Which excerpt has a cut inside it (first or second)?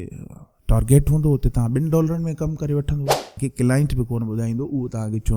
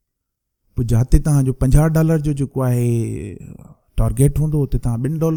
first